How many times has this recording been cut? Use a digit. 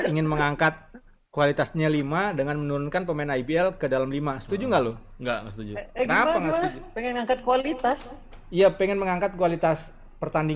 0